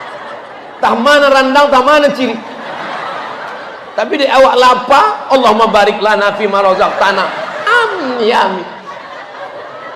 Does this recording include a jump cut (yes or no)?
no